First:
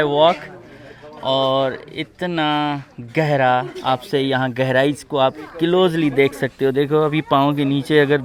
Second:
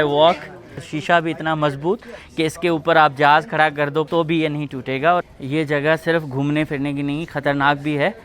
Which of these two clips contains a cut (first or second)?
second